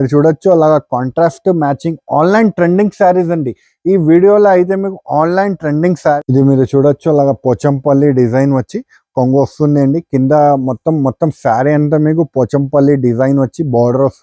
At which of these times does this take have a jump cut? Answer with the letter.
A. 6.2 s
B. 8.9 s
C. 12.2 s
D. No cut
A